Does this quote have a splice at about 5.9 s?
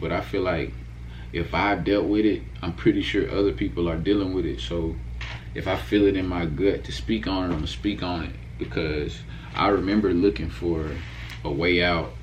no; 0 cuts

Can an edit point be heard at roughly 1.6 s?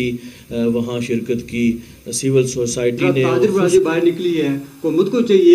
no; 1 cut; at 3.4 s

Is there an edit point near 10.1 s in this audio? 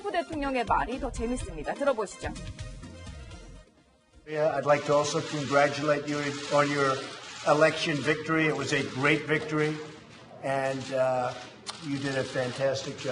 no; 1 cut; at 3.7 s

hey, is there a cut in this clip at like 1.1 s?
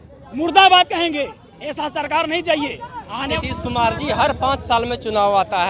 no; 1 cut; at 3.3 s

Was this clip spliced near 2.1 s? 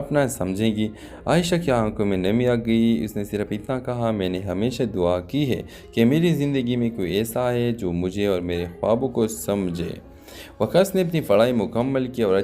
yes; 1 cut; at 2.1 s

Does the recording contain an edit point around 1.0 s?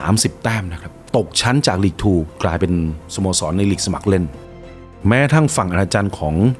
yes; 3 cuts; at 1.0 s, 2.3 s, 4.6 s

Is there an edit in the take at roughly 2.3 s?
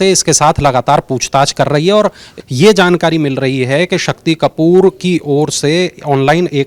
yes; 1 cut; at 2.3 s

